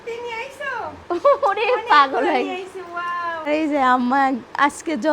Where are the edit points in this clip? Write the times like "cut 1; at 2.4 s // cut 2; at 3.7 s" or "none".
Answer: cut 1; at 3.5 s